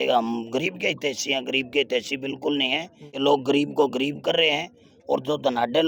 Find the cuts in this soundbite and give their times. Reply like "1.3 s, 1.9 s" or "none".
none